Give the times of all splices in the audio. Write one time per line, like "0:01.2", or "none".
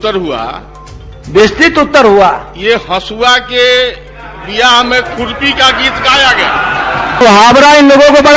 none